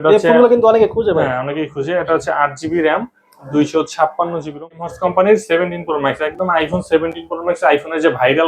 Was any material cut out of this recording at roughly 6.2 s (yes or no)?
no